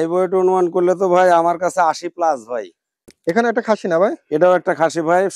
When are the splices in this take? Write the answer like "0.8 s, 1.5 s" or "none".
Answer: 3.1 s